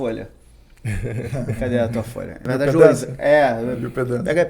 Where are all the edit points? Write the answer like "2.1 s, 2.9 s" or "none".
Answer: 2.4 s